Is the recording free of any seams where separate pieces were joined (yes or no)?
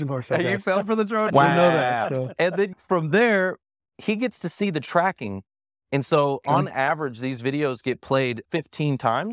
no